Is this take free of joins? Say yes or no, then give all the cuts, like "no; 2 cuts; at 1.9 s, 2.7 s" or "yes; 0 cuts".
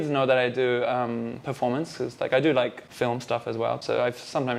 yes; 0 cuts